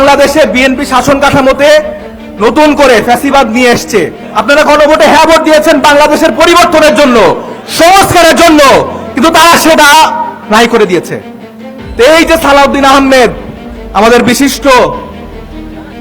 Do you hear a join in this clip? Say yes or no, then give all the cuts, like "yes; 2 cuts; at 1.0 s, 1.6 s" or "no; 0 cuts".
yes; 1 cut; at 4.2 s